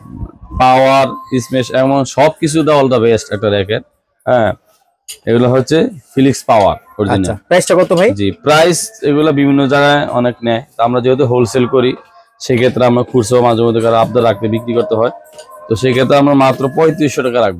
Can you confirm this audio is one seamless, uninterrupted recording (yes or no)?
yes